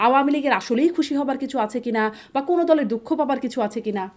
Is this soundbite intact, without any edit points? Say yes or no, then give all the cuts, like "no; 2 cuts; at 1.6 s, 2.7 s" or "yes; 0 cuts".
yes; 0 cuts